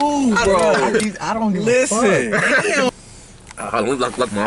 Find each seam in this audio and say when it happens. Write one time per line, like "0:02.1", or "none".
0:02.9